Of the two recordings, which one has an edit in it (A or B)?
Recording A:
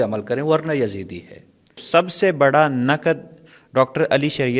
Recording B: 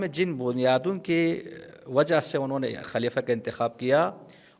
A